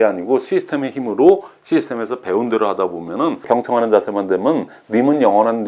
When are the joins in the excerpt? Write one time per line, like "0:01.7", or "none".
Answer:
0:03.4